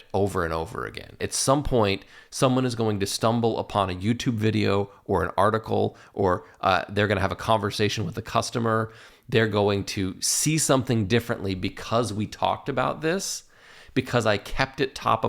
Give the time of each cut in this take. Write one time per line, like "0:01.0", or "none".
0:01.3